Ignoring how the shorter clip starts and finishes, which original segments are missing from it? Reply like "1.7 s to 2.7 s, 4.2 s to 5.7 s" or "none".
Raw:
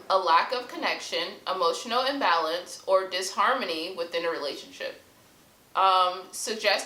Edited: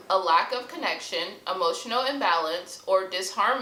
none